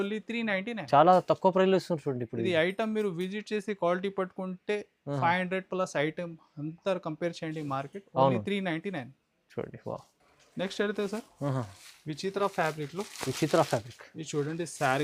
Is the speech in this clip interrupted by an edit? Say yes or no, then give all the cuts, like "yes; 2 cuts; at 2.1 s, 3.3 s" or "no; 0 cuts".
no; 0 cuts